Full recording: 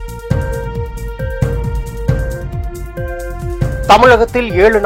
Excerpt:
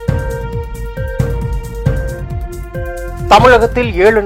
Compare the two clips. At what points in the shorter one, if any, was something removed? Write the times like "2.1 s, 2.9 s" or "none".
3.3 s